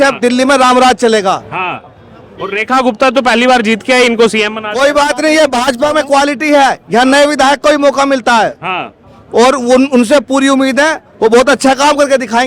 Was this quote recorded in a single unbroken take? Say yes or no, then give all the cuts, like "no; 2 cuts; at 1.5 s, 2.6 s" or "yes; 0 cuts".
yes; 0 cuts